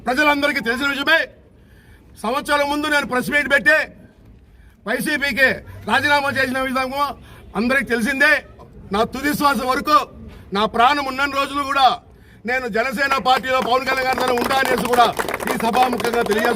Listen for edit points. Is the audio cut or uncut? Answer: cut